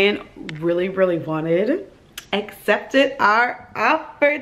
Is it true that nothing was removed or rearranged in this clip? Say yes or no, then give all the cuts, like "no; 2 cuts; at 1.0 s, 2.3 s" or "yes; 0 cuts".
yes; 0 cuts